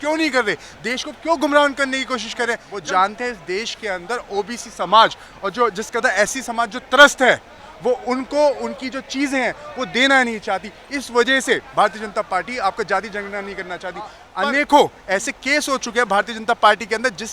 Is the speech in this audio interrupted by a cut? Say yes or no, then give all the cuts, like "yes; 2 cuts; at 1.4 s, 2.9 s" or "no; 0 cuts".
yes; 2 cuts; at 2.7 s, 14.2 s